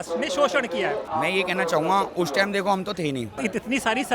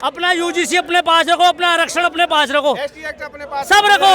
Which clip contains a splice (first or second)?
first